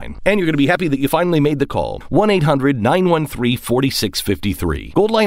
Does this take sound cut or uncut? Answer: uncut